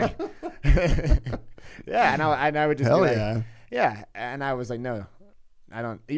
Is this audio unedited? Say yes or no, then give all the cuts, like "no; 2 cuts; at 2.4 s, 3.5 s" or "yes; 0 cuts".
yes; 0 cuts